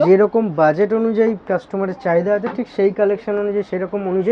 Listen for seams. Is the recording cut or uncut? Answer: uncut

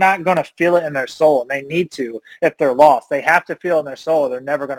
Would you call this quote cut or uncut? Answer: uncut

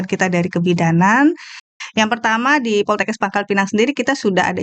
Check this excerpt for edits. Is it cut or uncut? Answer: cut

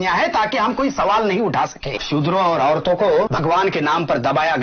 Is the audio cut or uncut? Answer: cut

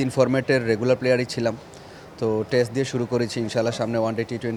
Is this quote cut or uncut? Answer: uncut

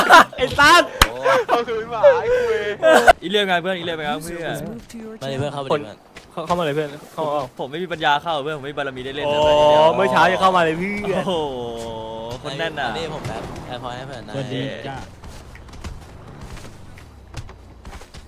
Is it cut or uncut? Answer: cut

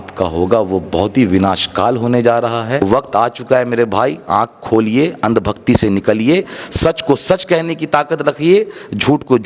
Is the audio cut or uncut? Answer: cut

